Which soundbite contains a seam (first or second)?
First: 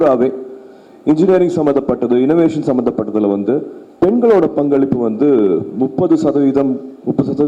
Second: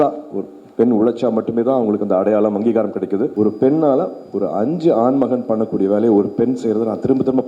second